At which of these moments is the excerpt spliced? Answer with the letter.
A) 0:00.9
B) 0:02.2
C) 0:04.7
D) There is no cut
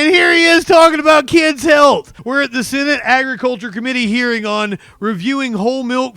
B